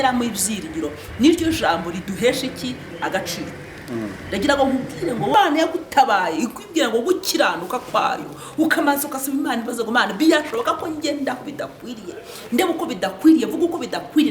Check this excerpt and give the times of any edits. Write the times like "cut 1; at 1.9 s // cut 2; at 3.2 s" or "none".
cut 1; at 5.3 s